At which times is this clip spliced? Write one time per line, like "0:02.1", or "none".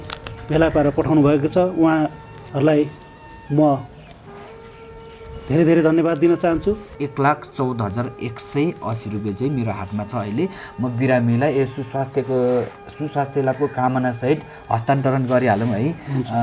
0:06.9